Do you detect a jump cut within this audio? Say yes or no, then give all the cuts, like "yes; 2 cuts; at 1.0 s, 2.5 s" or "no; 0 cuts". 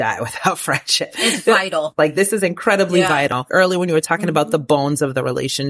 yes; 2 cuts; at 1.9 s, 3.4 s